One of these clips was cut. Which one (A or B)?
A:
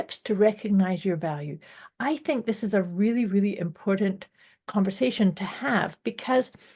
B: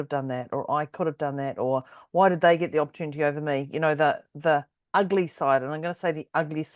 B